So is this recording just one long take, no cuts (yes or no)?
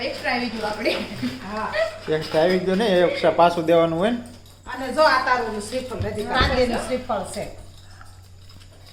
no